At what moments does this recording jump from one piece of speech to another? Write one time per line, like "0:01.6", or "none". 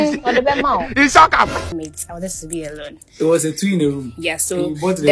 0:01.7